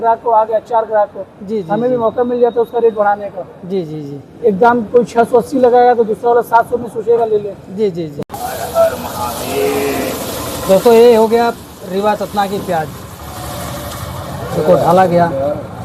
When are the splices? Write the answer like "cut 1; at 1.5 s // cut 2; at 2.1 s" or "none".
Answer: cut 1; at 8.2 s